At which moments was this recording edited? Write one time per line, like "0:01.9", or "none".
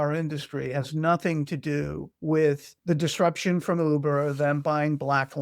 0:02.4